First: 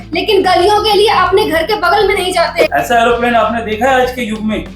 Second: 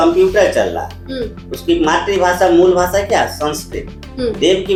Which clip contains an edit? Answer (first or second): first